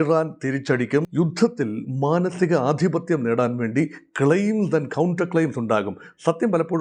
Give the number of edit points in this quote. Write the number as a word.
one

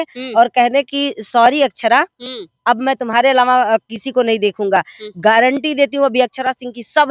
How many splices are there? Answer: zero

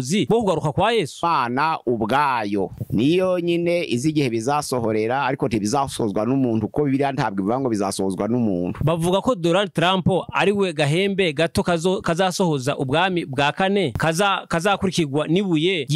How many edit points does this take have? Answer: two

